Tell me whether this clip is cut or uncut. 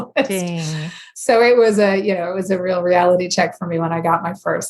uncut